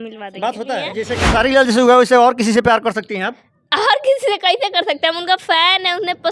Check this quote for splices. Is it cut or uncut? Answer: cut